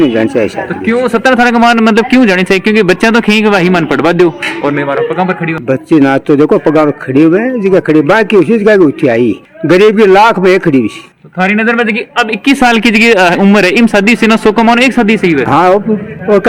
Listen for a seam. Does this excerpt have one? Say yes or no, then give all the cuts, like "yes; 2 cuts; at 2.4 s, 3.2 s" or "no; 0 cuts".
no; 0 cuts